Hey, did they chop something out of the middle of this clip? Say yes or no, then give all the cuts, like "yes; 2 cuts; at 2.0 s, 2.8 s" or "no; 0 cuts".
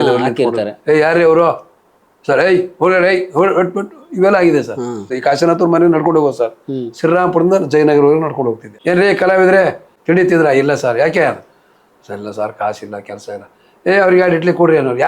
yes; 3 cuts; at 5.1 s, 8.7 s, 9.9 s